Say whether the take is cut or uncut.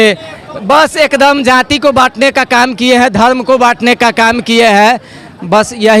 uncut